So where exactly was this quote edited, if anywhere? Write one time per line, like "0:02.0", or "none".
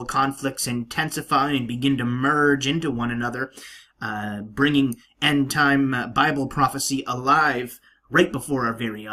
0:05.4